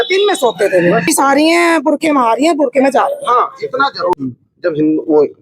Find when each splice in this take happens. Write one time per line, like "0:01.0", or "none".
0:01.1
0:04.1